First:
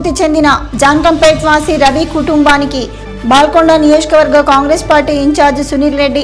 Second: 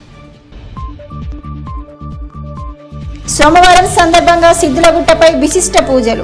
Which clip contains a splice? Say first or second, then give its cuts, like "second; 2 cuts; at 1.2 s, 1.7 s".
second; 2 cuts; at 1.2 s, 3.1 s